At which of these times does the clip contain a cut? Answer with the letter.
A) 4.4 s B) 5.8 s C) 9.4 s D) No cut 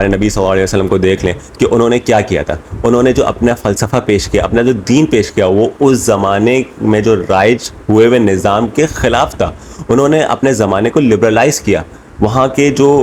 D